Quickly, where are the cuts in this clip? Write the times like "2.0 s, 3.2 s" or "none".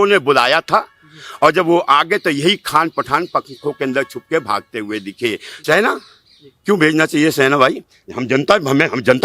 5.5 s